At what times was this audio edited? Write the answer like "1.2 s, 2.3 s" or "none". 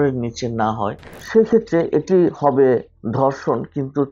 1.2 s